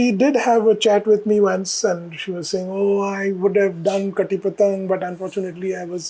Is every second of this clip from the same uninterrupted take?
yes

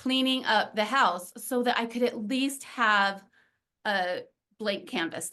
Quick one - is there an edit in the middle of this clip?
no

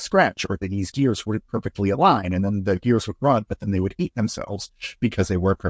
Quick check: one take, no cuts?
yes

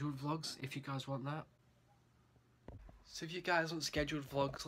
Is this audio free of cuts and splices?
yes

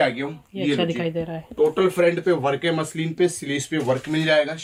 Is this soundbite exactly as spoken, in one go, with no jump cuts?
yes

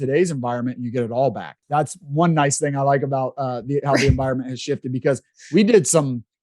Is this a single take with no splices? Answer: no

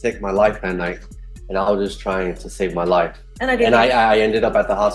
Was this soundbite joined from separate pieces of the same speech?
yes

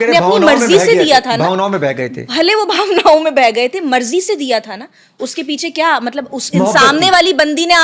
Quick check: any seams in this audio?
no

